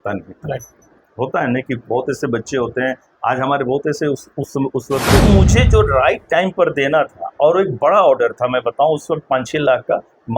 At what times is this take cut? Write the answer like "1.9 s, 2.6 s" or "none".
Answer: 5.2 s